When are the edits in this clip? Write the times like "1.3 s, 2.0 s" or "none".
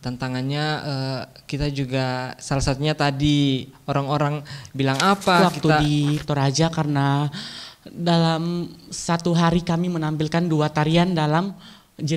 5.8 s